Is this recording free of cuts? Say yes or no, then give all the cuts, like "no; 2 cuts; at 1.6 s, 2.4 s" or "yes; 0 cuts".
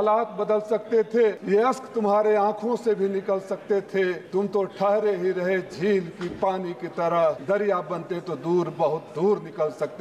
no; 3 cuts; at 1.4 s, 4.2 s, 7.4 s